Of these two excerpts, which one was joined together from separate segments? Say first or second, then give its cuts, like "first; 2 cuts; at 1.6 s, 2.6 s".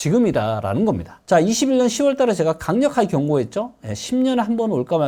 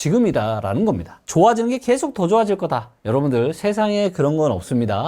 second; 1 cut; at 1.1 s